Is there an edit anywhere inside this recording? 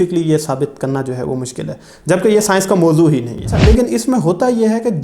yes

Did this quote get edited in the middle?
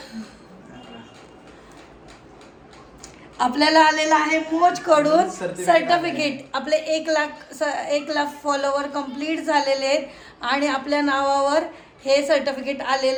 no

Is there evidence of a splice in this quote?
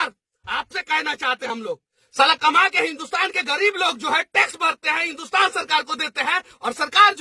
yes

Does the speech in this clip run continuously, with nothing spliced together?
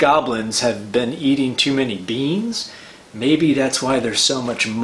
yes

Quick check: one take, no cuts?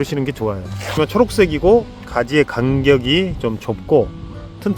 no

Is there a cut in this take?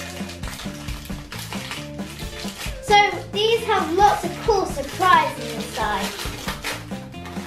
no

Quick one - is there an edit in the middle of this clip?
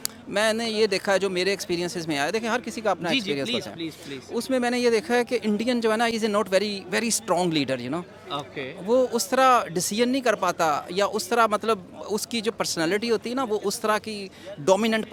no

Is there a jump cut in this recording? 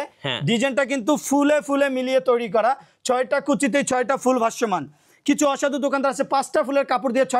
no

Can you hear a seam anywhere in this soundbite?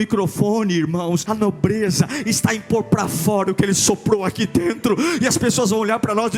yes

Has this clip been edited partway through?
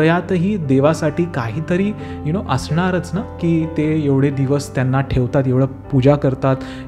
no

